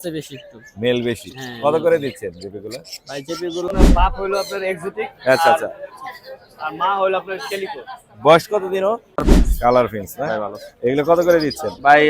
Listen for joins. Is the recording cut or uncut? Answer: cut